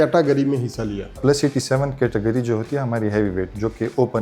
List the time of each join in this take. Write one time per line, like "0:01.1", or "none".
0:01.2